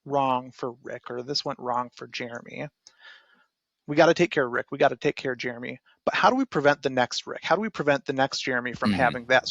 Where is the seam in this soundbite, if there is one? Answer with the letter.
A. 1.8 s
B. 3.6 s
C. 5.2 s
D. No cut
D